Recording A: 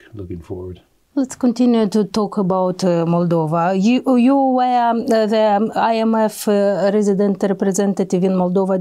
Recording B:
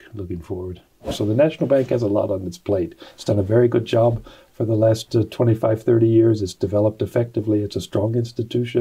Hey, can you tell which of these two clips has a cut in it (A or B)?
B